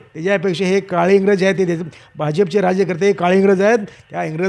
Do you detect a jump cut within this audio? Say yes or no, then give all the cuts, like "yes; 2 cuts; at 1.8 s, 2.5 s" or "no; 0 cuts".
no; 0 cuts